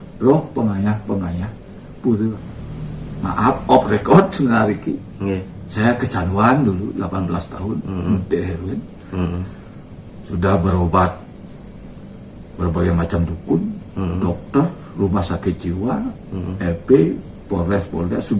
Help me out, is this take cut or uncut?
cut